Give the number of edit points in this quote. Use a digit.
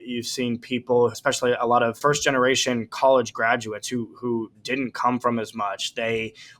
2